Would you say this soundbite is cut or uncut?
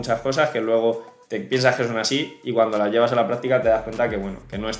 uncut